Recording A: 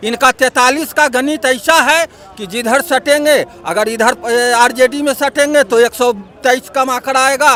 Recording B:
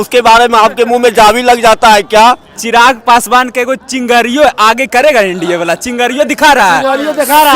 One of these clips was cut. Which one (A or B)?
B